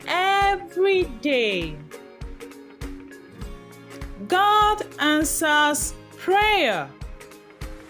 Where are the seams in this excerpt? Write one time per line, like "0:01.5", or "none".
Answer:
0:01.8
0:04.1